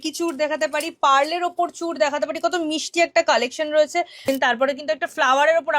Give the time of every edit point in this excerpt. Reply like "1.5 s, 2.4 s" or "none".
4.2 s